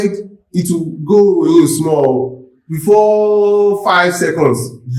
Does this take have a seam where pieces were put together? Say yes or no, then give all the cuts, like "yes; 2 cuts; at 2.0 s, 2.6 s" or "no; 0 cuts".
no; 0 cuts